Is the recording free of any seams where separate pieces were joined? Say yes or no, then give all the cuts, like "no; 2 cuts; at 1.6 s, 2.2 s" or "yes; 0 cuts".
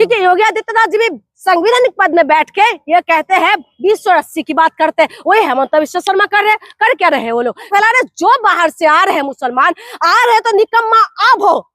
no; 1 cut; at 7.7 s